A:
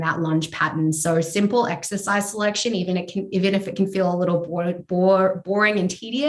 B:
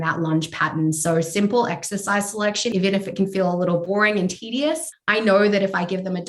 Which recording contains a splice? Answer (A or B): B